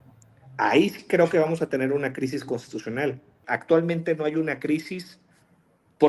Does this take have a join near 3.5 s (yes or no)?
yes